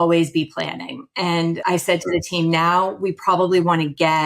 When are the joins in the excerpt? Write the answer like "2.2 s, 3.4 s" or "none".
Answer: 1.6 s